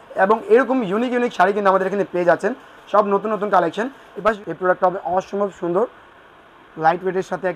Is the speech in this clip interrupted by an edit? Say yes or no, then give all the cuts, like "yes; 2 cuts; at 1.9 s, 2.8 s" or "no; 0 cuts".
yes; 1 cut; at 4.4 s